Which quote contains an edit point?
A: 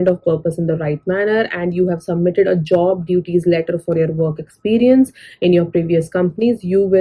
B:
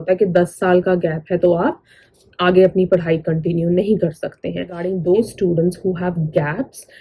B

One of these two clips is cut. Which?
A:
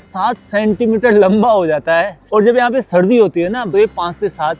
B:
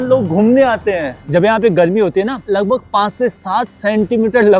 B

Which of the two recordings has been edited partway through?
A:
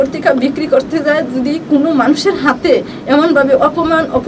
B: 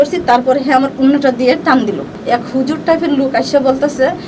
B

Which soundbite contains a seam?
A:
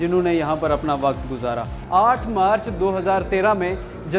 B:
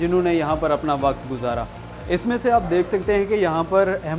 A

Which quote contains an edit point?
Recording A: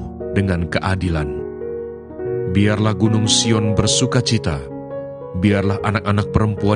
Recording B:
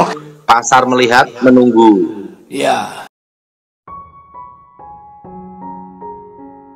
B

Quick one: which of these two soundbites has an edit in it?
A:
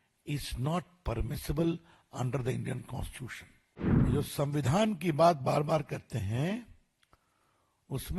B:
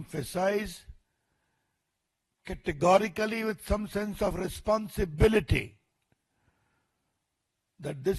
A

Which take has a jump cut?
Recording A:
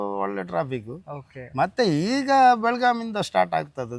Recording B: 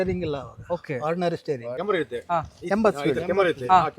B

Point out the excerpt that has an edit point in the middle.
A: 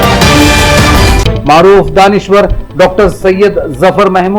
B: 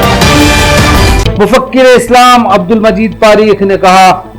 A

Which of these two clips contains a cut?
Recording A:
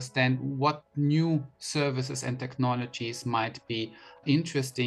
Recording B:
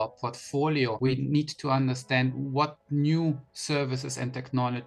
B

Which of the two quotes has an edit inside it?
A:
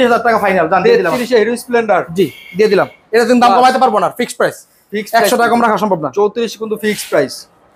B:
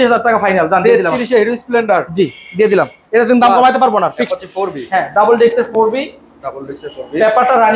B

